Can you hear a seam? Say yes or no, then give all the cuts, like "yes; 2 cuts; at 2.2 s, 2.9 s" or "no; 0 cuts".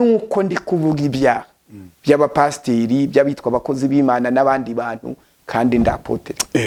no; 0 cuts